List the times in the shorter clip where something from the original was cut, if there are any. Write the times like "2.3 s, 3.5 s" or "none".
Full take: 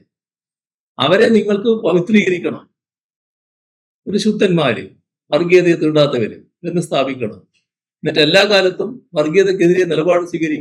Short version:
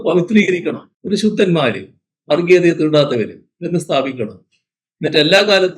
0.9 s